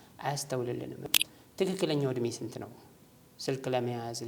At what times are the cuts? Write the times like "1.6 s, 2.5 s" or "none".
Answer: 1.0 s